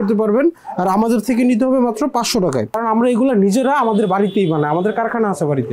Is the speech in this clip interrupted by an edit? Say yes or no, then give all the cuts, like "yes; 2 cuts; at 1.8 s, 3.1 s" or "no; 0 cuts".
yes; 1 cut; at 2.8 s